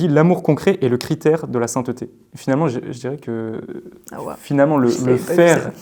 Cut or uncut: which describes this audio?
uncut